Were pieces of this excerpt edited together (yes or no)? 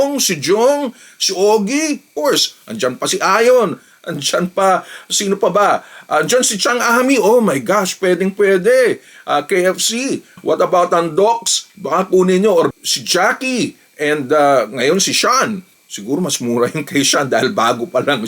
no